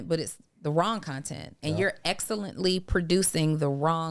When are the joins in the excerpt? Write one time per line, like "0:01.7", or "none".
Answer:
none